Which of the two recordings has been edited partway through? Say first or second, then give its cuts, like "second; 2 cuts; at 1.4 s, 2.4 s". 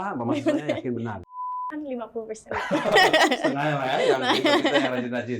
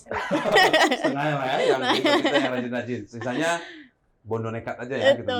first; 1 cut; at 1.3 s